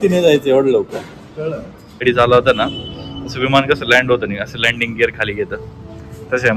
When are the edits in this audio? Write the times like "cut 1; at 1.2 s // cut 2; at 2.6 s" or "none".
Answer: cut 1; at 2.0 s

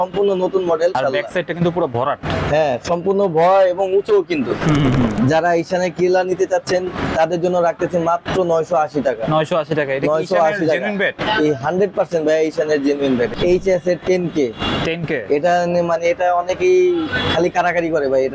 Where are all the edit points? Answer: cut 1; at 0.9 s // cut 2; at 5.2 s // cut 3; at 13.3 s

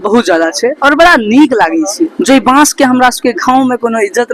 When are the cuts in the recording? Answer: cut 1; at 2.2 s

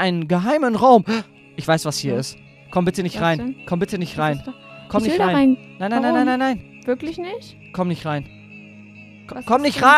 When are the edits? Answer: none

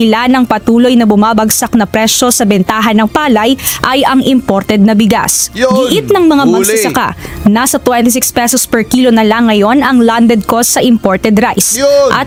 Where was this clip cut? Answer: none

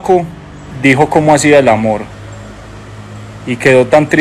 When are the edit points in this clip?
none

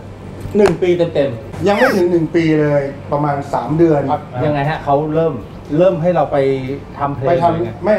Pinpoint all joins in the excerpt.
none

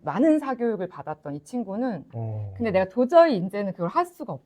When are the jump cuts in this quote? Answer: cut 1; at 2.1 s

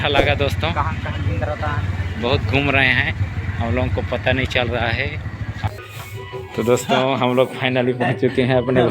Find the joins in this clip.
cut 1; at 5.7 s

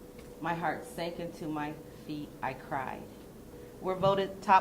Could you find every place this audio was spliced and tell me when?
cut 1; at 3.6 s

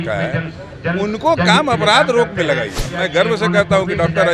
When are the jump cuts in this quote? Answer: cut 1; at 2.9 s

